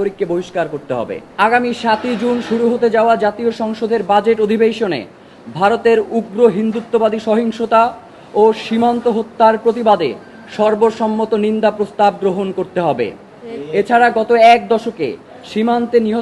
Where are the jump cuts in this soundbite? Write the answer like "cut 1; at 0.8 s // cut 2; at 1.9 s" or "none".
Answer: cut 1; at 1.2 s